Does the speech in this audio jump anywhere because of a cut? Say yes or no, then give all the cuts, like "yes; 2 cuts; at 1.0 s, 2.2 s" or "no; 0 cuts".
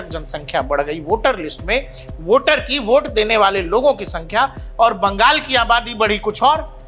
no; 0 cuts